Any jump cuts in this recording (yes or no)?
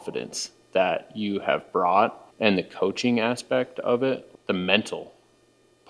yes